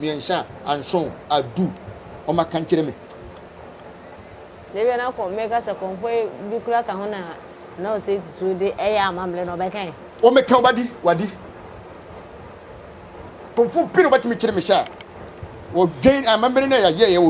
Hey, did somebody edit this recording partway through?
no; 0 cuts

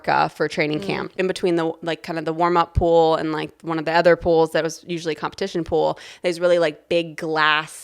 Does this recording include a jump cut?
yes; 1 cut; at 1.1 s

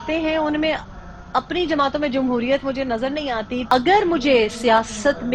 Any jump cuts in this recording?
yes; 1 cut; at 3.6 s

